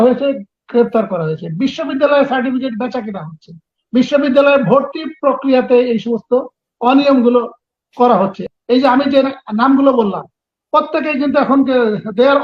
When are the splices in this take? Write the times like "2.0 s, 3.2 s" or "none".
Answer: 8.4 s